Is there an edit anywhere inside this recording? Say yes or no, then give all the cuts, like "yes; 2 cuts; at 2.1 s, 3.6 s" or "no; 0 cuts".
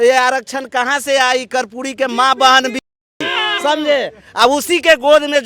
no; 0 cuts